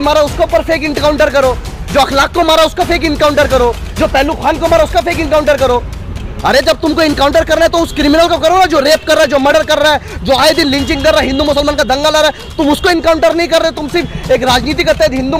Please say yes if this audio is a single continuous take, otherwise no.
yes